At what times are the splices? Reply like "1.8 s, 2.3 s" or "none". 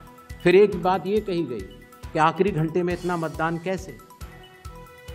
none